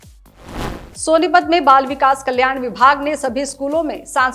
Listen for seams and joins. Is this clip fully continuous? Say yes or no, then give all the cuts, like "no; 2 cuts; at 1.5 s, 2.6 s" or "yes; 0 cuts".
no; 1 cut; at 0.9 s